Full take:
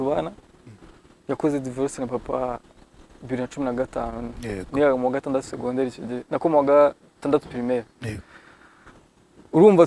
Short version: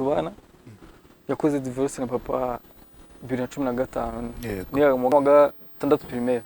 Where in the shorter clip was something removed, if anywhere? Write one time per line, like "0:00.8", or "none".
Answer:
0:05.1